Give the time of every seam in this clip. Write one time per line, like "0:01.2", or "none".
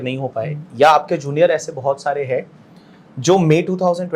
none